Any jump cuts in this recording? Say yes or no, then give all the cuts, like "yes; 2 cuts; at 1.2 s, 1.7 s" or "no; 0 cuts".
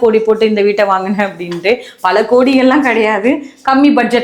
no; 0 cuts